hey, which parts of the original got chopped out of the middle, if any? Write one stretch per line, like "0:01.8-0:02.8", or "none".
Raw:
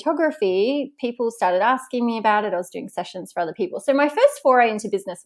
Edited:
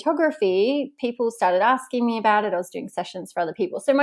none